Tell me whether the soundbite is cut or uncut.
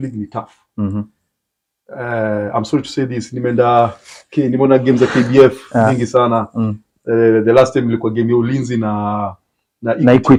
uncut